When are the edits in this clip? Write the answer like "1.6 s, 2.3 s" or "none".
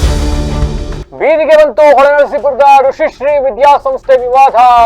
1.0 s